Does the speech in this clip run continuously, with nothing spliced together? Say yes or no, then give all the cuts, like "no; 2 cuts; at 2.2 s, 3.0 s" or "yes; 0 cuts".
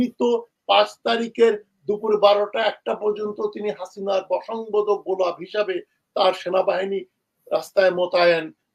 yes; 0 cuts